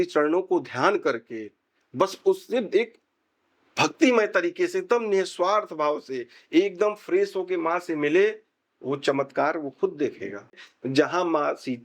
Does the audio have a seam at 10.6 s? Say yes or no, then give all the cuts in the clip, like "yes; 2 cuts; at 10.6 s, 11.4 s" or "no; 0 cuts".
yes; 1 cut; at 10.6 s